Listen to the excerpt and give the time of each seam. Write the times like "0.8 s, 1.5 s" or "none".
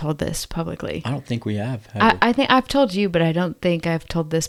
none